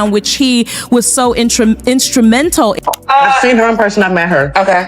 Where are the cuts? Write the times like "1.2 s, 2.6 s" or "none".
2.8 s